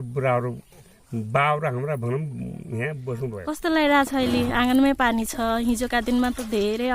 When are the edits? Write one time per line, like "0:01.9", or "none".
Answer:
0:03.4

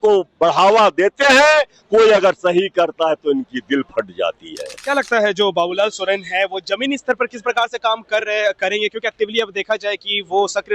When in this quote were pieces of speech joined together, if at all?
0:04.8

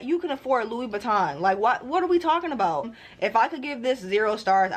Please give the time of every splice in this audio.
0:02.9

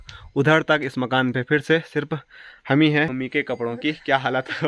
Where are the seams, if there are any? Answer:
0:03.1

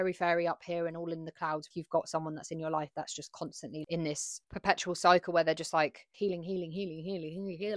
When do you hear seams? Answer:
0:01.6

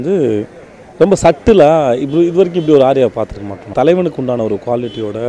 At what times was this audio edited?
0:03.7

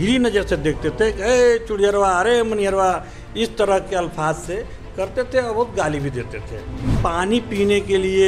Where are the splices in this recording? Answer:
0:06.9

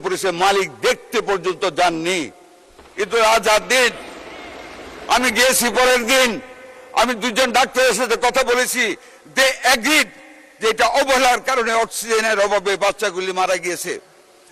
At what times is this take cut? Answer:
none

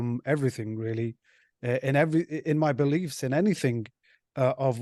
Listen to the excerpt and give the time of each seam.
none

